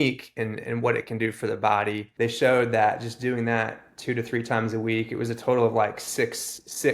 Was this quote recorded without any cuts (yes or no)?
no